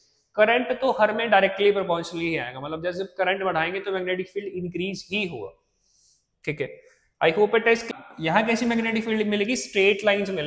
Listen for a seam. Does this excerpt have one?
yes; 1 cut; at 7.8 s

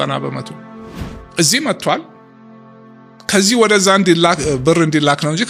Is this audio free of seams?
yes; 0 cuts

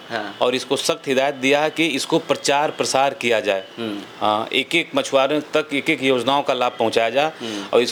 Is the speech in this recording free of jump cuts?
yes; 0 cuts

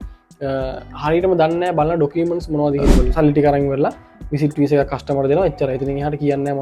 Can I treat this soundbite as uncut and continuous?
no; 1 cut; at 3.1 s

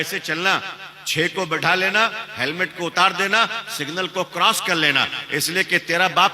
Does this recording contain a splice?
no; 0 cuts

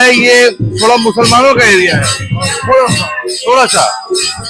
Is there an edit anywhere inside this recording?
no; 0 cuts

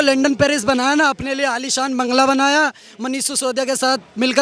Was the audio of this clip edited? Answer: no; 0 cuts

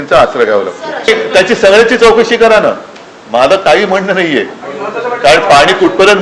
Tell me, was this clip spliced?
yes; 1 cut; at 1.1 s

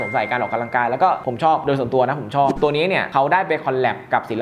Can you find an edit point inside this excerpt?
yes; 1 cut; at 2.5 s

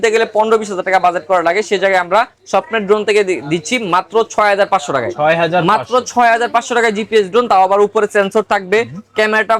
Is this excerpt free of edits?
yes; 0 cuts

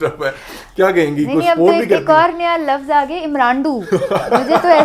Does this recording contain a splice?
no; 0 cuts

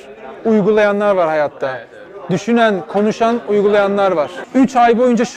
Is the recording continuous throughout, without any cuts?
no; 1 cut; at 4.4 s

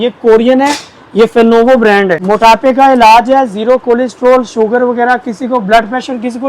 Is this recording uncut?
no; 1 cut; at 2.2 s

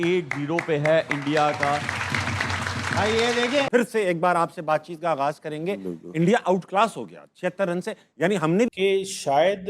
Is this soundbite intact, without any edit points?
no; 2 cuts; at 3.7 s, 8.7 s

